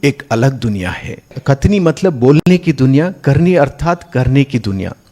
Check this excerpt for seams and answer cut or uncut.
cut